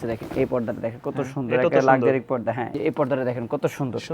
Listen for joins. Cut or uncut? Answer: cut